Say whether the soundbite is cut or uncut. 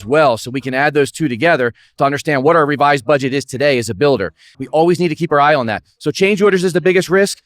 cut